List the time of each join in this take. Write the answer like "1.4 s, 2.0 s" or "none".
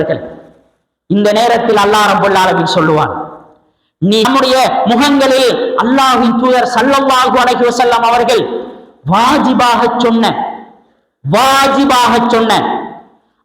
4.3 s